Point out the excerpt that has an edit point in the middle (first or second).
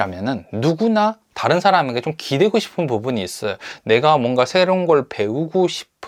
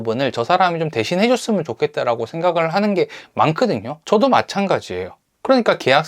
second